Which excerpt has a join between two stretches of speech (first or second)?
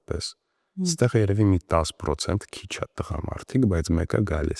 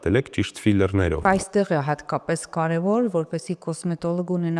second